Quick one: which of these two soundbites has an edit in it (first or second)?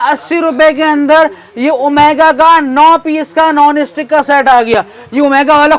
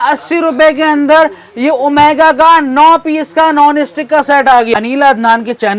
second